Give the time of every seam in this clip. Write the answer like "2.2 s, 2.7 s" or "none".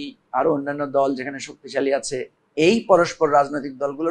2.4 s